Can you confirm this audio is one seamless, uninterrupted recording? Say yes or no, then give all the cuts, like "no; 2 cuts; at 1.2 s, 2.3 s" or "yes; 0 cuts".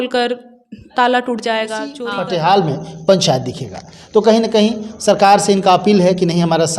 no; 1 cut; at 2.0 s